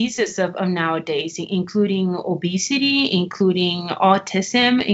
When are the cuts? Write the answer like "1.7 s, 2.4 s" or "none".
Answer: none